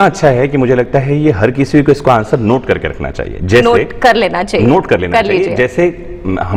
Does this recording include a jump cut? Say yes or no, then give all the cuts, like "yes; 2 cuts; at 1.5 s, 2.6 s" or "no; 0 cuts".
no; 0 cuts